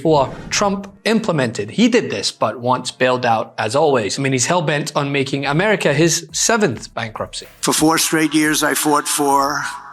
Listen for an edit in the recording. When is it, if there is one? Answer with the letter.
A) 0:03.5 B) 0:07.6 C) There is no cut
B